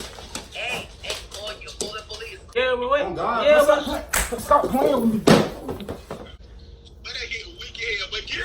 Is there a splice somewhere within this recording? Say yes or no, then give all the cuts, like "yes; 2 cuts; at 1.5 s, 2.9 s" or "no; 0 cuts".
yes; 2 cuts; at 2.5 s, 6.3 s